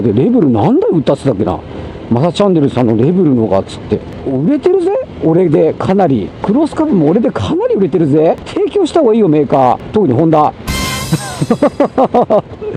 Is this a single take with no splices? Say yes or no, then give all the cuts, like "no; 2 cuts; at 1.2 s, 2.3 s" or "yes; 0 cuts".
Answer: no; 4 cuts; at 4.1 s, 6.3 s, 8.5 s, 9.8 s